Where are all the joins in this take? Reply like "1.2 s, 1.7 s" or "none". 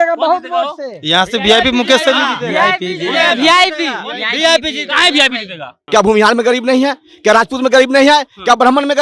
5.8 s